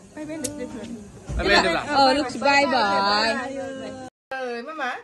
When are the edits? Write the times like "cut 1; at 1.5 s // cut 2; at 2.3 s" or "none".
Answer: cut 1; at 4.0 s